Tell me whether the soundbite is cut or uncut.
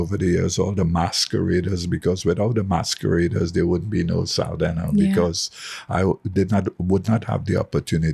uncut